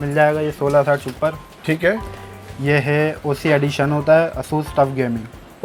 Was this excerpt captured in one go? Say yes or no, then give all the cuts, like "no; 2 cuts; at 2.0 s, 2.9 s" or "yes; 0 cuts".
yes; 0 cuts